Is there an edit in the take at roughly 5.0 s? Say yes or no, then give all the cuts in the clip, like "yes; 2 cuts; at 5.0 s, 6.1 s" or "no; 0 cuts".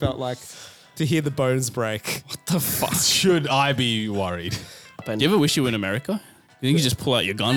yes; 1 cut; at 5.0 s